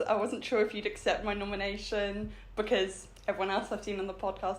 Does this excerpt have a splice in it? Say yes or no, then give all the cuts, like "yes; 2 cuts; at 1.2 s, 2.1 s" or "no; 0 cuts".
no; 0 cuts